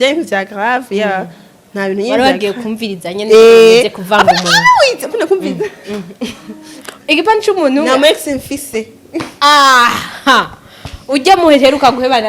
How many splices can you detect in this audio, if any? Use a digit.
1